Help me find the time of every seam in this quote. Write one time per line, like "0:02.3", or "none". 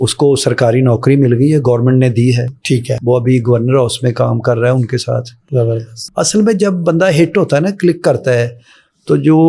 none